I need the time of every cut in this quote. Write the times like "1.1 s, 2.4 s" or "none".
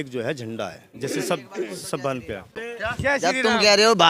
2.6 s